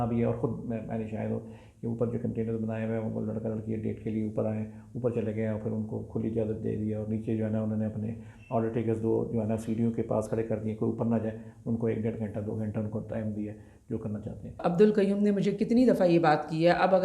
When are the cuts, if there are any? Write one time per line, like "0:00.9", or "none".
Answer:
0:14.6